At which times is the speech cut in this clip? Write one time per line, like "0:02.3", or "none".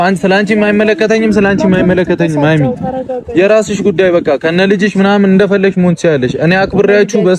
none